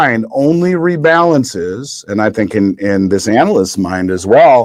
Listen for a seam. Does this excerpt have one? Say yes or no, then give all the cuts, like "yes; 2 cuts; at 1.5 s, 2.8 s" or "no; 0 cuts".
no; 0 cuts